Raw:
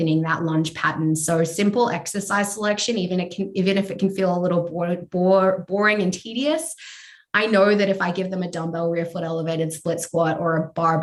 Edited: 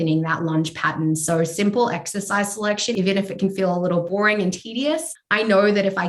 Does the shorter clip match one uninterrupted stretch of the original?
no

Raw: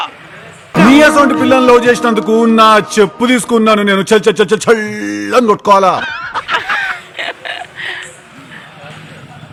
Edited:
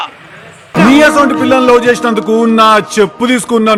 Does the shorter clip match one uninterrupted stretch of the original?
yes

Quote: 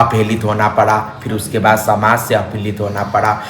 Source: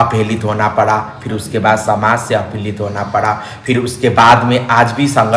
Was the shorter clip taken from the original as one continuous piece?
yes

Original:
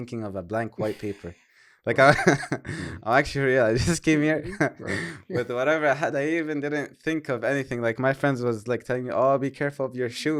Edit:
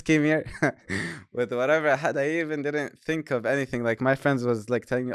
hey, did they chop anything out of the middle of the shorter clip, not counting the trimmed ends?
no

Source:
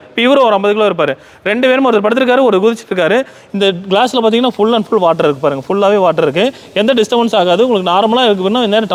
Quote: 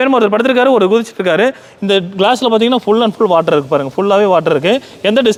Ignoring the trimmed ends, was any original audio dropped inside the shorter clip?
no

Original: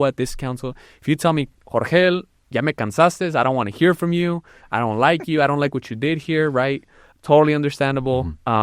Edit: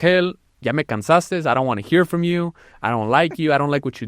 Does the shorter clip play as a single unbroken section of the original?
yes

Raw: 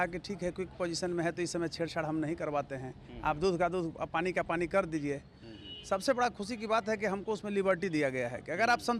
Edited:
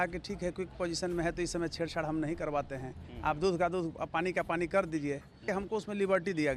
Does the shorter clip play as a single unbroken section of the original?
no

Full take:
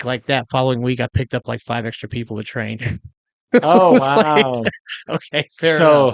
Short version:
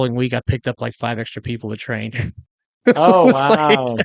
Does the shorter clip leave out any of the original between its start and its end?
no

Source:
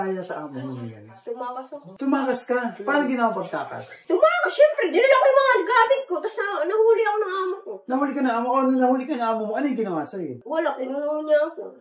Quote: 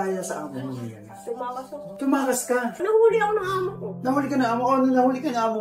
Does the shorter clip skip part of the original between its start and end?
yes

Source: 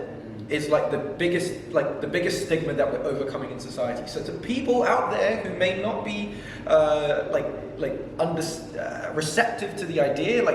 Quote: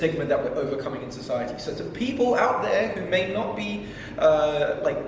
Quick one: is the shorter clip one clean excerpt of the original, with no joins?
yes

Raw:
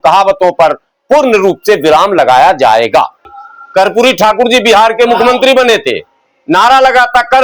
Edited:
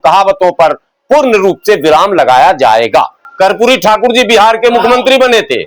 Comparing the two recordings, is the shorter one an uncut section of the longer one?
no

